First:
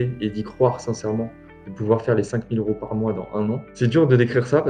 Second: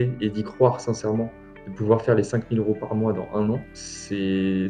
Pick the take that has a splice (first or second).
first